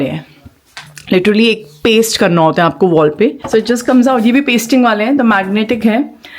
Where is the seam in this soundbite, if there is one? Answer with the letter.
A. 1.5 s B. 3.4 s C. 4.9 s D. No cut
B